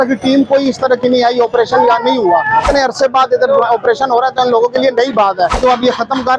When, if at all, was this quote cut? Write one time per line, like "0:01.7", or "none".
0:02.7
0:05.6